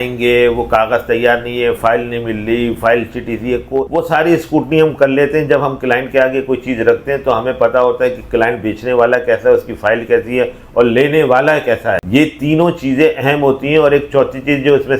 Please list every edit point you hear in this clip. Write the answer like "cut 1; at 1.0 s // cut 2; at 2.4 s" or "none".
cut 1; at 3.9 s // cut 2; at 12.0 s